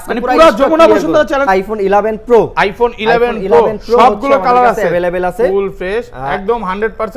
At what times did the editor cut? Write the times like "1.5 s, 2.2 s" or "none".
1.4 s